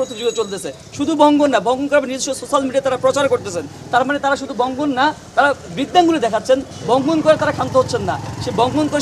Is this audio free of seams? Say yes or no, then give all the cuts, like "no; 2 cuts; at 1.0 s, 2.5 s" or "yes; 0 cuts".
yes; 0 cuts